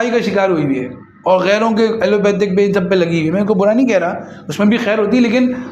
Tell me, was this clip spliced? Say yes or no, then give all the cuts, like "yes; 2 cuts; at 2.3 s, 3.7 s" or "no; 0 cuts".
no; 0 cuts